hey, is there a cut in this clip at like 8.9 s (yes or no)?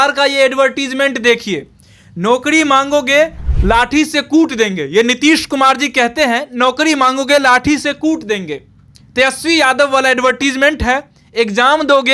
no